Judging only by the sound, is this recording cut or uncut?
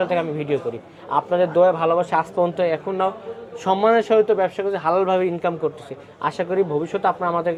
uncut